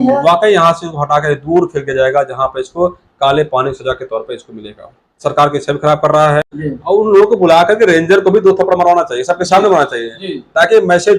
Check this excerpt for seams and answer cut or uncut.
cut